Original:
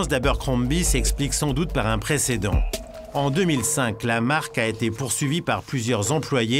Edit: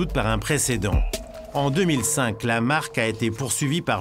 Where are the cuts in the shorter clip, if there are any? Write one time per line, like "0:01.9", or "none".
none